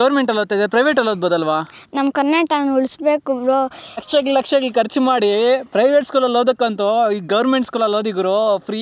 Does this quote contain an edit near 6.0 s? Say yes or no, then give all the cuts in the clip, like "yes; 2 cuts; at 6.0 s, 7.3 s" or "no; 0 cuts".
no; 1 cut; at 4.1 s